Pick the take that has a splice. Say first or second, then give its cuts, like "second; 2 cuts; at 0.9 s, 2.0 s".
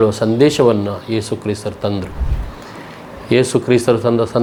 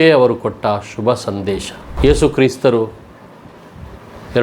second; 1 cut; at 1.8 s